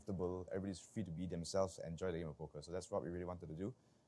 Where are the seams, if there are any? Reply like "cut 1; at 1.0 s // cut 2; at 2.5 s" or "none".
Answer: cut 1; at 1.5 s // cut 2; at 2.5 s

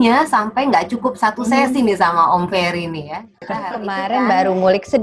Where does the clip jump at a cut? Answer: cut 1; at 3.9 s

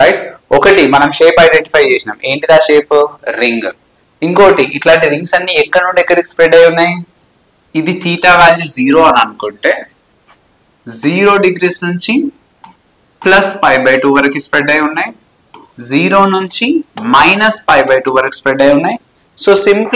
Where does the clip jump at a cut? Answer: none

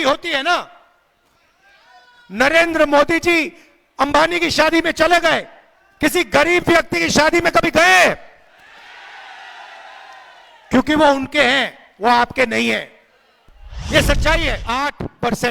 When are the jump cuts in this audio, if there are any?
cut 1; at 14.6 s

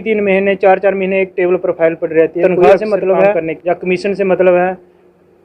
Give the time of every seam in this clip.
cut 1; at 2.6 s

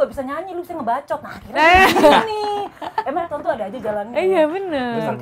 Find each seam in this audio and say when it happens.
none

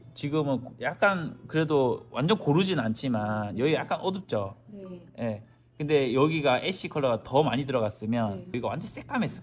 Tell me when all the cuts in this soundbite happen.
cut 1; at 8.5 s

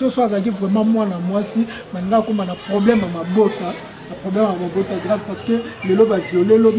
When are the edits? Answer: none

